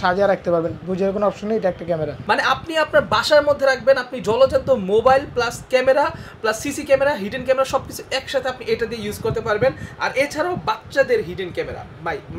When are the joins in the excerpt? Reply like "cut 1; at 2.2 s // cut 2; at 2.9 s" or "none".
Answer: cut 1; at 2.1 s